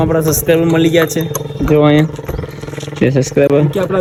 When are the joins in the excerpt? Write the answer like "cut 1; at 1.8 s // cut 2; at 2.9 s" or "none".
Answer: none